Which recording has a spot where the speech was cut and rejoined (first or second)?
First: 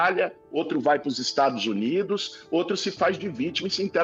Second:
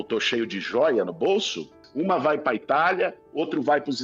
second